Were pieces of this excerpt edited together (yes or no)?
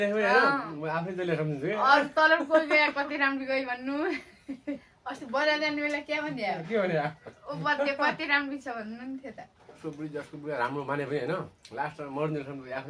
yes